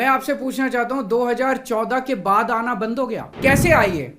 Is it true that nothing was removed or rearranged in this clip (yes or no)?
no